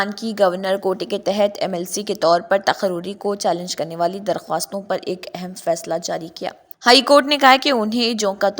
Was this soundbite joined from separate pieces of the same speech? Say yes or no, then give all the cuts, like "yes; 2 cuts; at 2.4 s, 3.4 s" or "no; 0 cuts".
yes; 1 cut; at 6.6 s